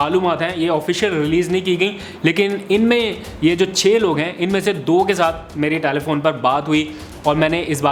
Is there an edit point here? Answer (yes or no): no